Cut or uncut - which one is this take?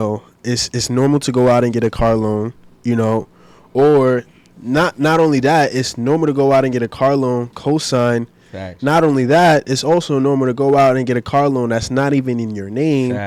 uncut